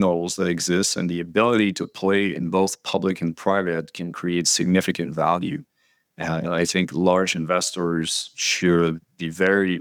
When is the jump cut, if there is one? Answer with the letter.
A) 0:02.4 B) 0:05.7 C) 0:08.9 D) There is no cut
D